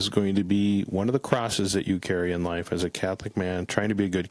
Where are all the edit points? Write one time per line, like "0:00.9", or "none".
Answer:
none